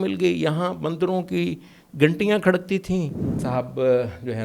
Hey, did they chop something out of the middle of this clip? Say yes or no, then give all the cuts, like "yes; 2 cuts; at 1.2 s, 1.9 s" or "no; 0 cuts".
yes; 1 cut; at 3.4 s